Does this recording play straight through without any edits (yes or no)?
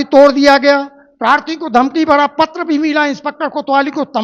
yes